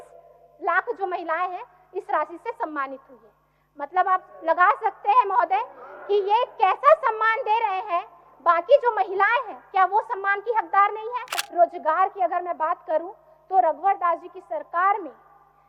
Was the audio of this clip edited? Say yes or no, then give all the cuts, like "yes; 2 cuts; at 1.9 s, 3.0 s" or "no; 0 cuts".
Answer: yes; 1 cut; at 11.5 s